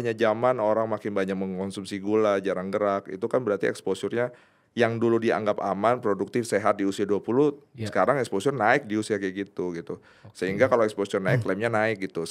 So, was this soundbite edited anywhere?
no; 0 cuts

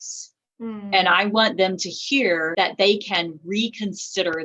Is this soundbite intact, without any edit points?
no; 1 cut; at 2.5 s

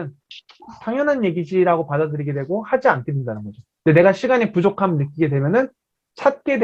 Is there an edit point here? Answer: no; 0 cuts

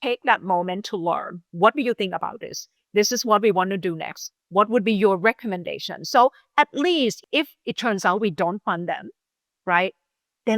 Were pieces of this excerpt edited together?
yes; 2 cuts; at 1.4 s, 7.2 s

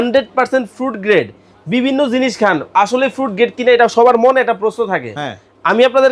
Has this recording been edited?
no; 0 cuts

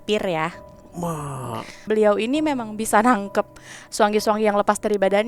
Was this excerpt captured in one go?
no; 1 cut; at 1.8 s

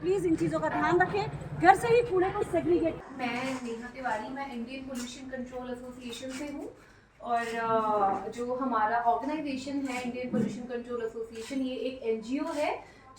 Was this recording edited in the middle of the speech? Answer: yes; 1 cut; at 3.1 s

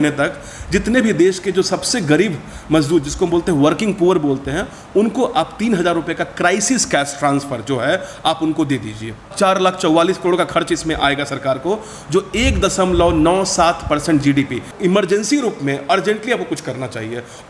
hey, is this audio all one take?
no; 2 cuts; at 9.2 s, 14.7 s

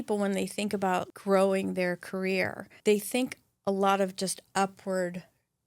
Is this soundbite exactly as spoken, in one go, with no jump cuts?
no; 2 cuts; at 1.1 s, 2.7 s

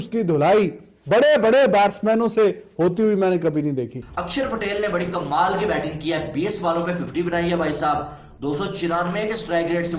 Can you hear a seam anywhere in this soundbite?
yes; 1 cut; at 4.2 s

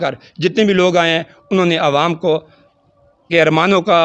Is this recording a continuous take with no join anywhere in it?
yes; 0 cuts

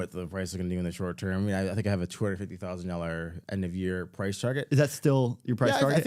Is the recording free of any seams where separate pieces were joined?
yes; 0 cuts

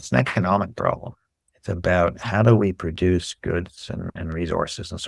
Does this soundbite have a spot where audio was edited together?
no; 0 cuts

